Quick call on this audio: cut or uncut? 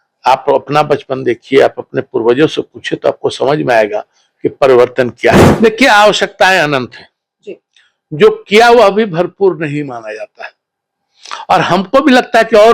cut